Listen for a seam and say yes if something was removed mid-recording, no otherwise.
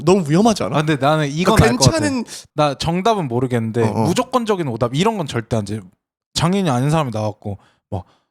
yes